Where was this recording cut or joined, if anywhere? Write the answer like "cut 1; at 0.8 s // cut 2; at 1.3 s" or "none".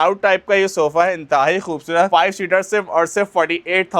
none